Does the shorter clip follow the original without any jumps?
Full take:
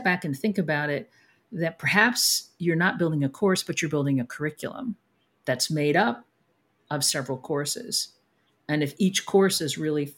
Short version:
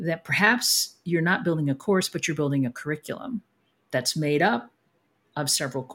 yes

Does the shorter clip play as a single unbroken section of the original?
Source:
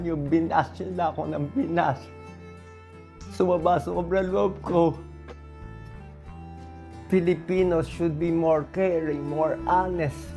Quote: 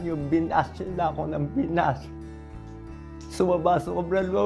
yes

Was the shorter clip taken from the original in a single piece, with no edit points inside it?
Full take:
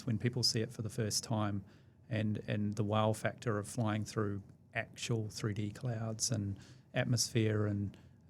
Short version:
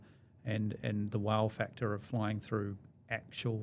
yes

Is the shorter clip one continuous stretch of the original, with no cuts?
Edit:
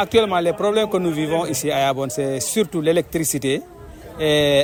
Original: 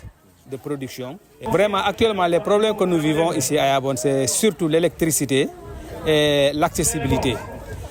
yes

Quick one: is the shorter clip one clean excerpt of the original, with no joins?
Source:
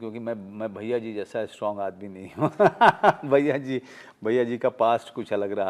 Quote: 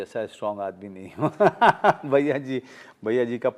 yes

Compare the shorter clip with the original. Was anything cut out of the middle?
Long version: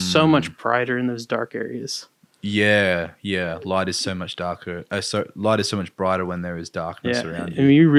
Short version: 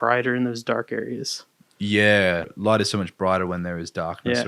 yes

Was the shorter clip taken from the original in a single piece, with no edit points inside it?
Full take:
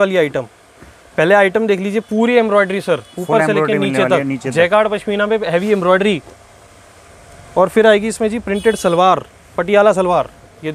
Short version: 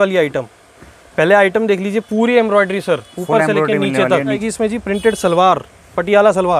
no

